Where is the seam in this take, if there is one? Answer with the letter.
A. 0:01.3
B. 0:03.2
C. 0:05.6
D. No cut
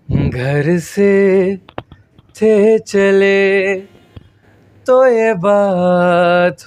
D